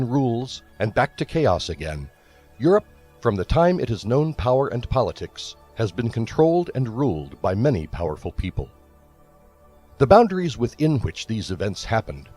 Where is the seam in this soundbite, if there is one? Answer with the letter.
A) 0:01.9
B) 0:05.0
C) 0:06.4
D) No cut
A